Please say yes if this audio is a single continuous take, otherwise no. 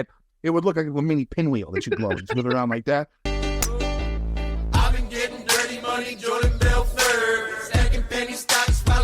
no